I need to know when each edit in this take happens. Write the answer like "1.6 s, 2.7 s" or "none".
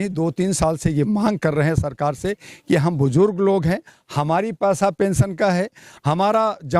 none